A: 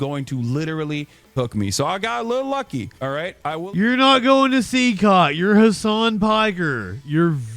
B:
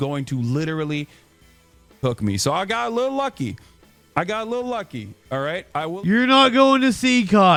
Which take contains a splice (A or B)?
A